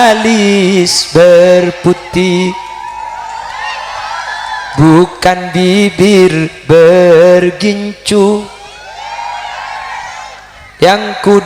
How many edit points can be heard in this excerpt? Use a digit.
0